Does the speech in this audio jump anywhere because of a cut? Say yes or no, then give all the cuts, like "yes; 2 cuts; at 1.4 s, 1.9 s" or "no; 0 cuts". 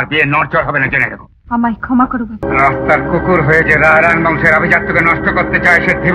yes; 1 cut; at 2.4 s